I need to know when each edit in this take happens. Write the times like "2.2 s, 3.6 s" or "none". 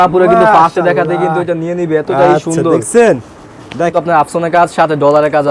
3.9 s